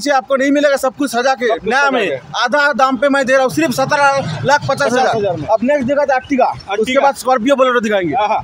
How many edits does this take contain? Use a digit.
0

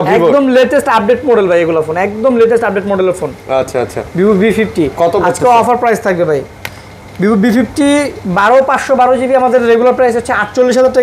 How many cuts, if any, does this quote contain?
0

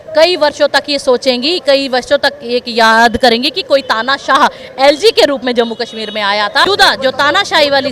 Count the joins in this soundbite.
1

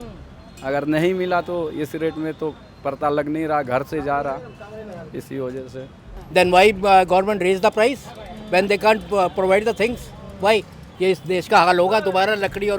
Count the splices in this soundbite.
2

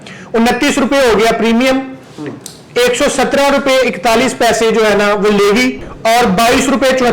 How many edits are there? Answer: 1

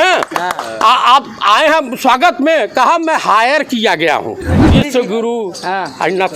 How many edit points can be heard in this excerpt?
1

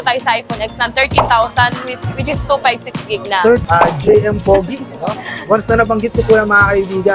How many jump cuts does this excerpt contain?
1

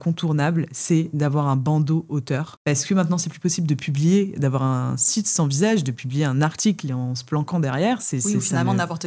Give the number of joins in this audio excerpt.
0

